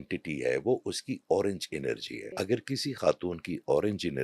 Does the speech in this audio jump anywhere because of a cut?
yes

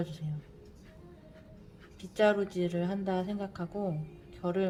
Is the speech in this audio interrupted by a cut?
no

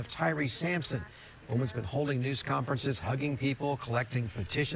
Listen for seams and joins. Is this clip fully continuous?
yes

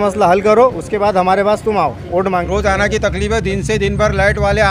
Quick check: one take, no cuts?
no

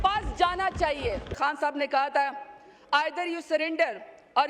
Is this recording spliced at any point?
yes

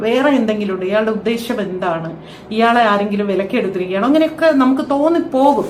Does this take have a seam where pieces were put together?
no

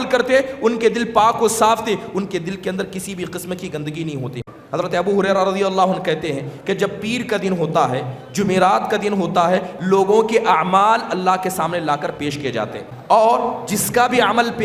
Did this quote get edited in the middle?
yes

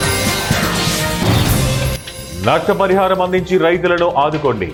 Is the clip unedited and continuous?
yes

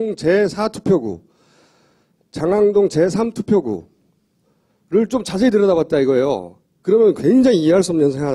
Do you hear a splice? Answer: yes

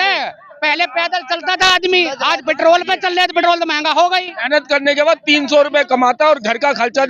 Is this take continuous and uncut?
yes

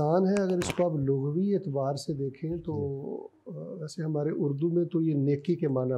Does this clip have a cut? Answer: no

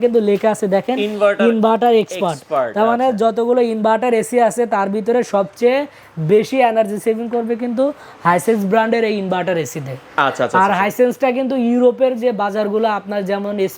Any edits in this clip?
no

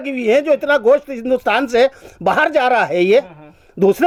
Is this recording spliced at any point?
no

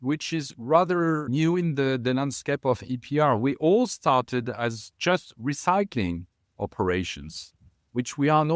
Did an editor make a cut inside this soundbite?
no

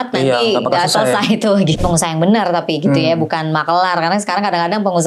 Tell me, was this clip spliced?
yes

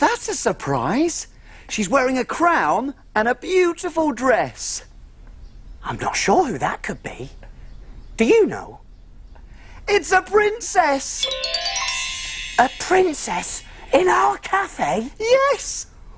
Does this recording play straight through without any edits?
no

